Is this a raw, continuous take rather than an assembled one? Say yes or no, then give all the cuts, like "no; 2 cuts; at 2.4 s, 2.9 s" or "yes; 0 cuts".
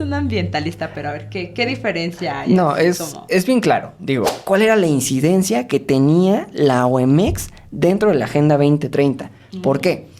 no; 1 cut; at 4.4 s